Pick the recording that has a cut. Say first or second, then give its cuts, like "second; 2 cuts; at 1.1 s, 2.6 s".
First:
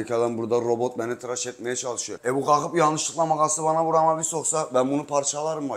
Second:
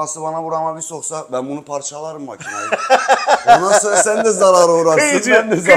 first; 1 cut; at 2.1 s